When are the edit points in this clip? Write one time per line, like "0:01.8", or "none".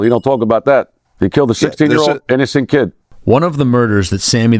0:03.1